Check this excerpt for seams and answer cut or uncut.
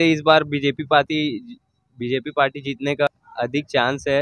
cut